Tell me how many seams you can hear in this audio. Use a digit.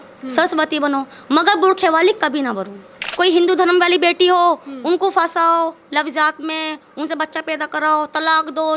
1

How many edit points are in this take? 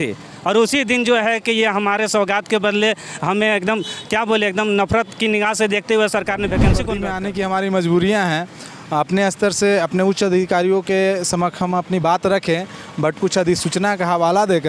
1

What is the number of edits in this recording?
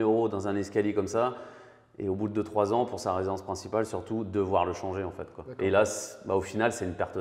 0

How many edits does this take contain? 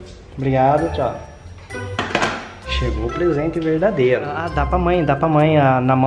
1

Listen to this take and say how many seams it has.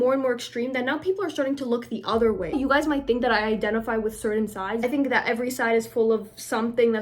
2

